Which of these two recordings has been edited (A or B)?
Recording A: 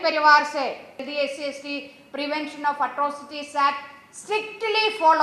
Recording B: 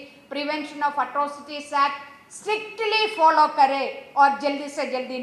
A